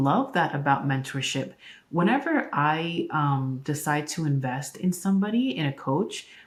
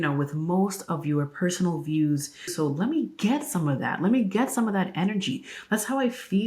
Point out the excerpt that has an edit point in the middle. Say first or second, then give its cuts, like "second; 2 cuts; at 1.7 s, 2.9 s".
second; 1 cut; at 2.5 s